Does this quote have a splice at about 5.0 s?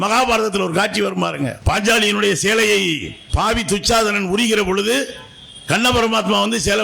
no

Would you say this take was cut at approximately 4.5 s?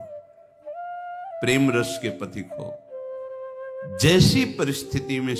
no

